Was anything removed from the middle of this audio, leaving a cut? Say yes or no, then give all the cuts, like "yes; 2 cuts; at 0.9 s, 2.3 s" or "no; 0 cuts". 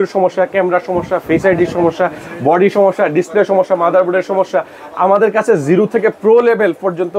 no; 0 cuts